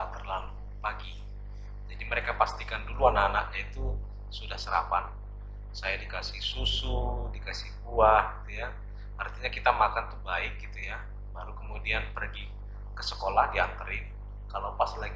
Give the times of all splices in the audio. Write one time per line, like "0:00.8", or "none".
none